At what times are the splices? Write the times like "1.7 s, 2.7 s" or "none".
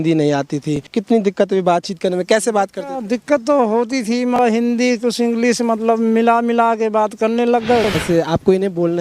0.9 s, 4.4 s, 7.9 s